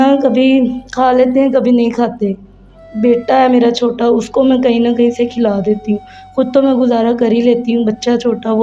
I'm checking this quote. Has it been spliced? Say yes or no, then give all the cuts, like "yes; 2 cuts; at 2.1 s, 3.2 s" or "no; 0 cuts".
no; 0 cuts